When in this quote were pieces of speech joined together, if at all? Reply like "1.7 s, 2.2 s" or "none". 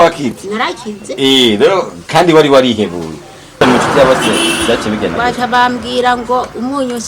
3.6 s